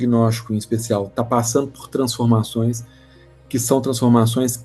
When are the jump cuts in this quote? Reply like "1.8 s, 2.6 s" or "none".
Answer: none